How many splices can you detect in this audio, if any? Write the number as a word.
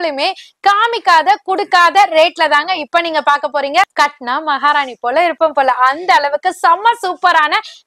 one